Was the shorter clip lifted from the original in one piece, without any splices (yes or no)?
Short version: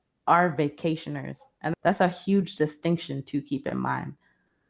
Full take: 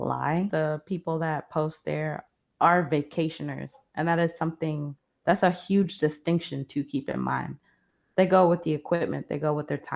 no